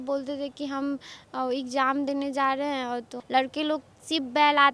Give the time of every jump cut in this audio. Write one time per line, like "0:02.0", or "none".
0:03.1